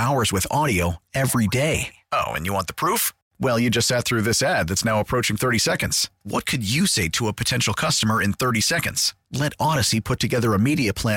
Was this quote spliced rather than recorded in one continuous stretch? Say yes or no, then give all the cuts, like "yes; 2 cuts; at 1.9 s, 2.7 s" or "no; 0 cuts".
no; 0 cuts